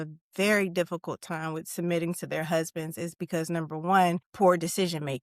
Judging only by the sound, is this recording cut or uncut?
cut